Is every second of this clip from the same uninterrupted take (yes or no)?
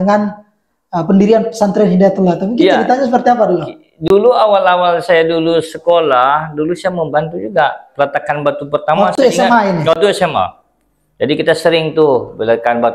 yes